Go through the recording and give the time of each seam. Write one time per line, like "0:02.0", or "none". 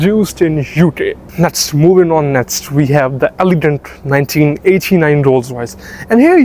0:01.2